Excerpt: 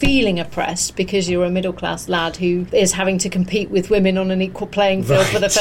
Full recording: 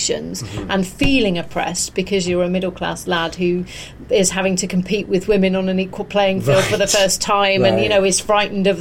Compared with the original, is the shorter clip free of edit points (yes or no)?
no